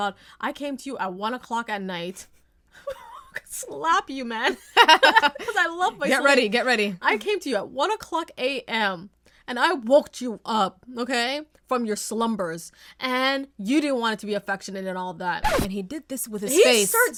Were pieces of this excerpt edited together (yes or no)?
no